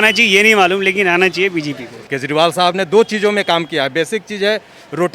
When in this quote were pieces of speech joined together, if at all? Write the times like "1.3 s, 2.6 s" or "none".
2.0 s